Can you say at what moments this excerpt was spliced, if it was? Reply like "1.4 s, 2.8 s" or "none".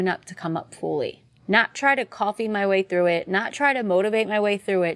1.3 s